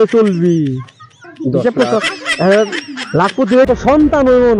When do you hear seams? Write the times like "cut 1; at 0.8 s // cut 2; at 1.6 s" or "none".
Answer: cut 1; at 3.7 s